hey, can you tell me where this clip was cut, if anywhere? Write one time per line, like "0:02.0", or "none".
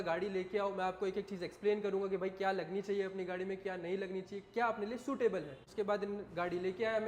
0:05.6